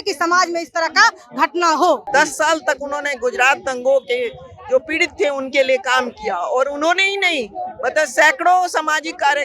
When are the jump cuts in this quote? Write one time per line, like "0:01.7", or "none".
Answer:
0:02.0